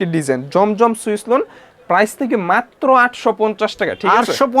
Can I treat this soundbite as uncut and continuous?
yes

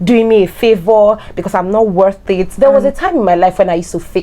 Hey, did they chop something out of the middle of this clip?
yes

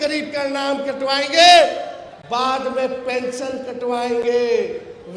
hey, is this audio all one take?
yes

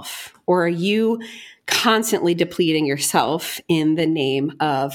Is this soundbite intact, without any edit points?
yes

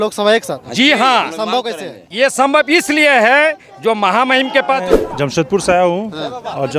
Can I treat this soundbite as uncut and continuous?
no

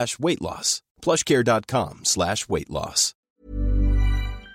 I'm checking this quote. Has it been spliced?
yes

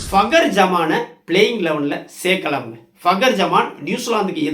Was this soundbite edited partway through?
no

